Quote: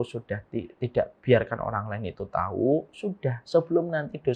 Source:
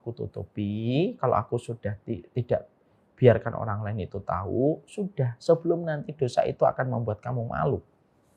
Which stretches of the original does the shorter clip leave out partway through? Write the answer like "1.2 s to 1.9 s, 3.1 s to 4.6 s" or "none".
2.7 s to 3.1 s